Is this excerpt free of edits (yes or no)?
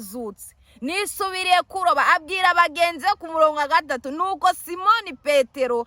yes